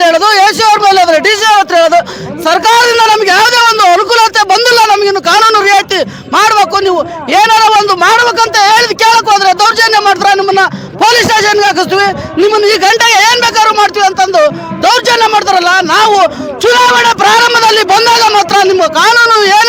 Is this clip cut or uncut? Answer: uncut